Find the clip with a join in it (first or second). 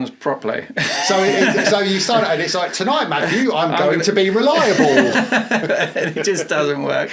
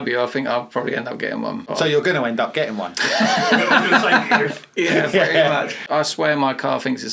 second